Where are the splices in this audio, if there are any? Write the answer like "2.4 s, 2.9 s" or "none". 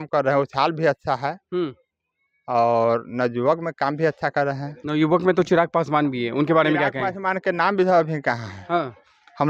none